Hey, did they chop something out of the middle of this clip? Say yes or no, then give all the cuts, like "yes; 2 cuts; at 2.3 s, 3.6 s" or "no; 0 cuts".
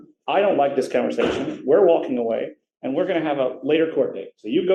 no; 0 cuts